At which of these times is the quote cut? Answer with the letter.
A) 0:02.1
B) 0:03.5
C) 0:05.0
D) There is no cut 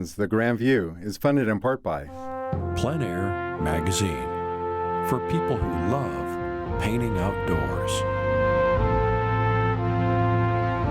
A